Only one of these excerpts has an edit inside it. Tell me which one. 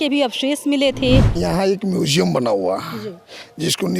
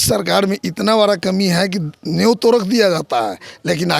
first; 1 cut; at 1.3 s

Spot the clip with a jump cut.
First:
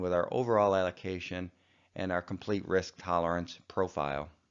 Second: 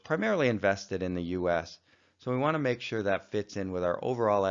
second; 1 cut; at 2.6 s

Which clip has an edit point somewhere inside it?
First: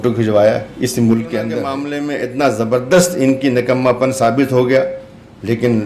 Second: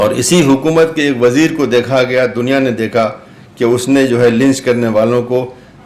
first; 1 cut; at 1.7 s

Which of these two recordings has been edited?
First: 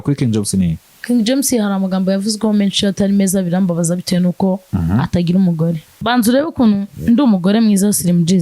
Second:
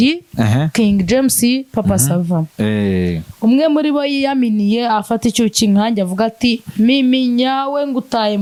first; 1 cut; at 6.0 s

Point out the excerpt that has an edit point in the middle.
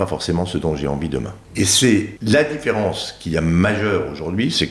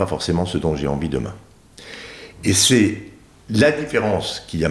first; 2 cuts; at 1.4 s, 2.1 s

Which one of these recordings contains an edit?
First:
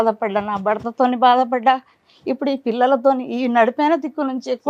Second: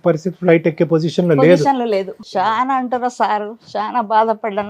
second; 1 cut; at 2.2 s

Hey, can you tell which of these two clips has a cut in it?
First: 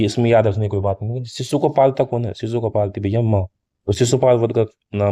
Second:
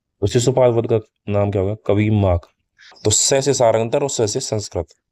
second; 1 cut; at 3.0 s

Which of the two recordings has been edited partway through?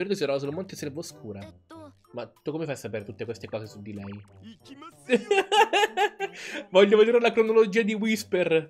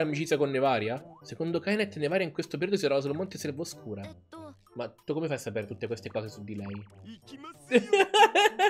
second; 1 cut; at 1.2 s

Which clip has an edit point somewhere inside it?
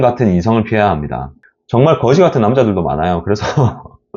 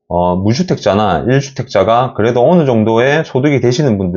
first; 1 cut; at 1.5 s

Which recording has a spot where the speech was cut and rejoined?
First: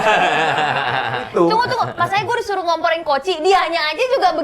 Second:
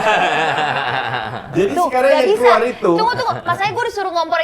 first; 1 cut; at 1.2 s

